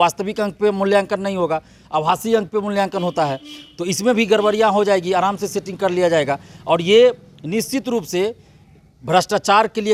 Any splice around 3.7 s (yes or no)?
no